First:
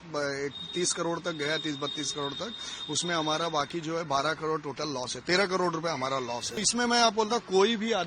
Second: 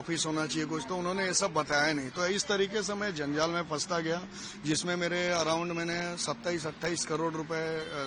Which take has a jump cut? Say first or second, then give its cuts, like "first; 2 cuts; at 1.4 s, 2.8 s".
first; 1 cut; at 6.6 s